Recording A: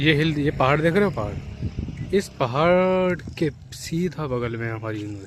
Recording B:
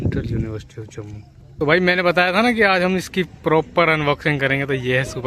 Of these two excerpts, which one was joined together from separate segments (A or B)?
B